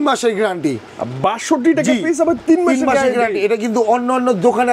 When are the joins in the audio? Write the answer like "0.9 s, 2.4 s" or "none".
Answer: none